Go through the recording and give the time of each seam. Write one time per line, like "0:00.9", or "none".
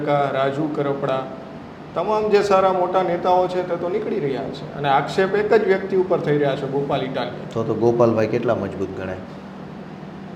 none